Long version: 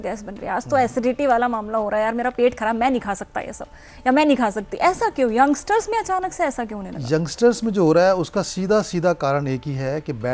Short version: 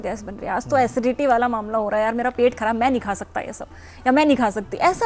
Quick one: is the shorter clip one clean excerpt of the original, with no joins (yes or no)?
yes